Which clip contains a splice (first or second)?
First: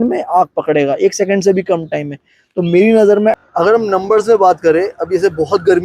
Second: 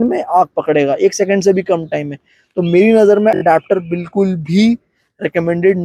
first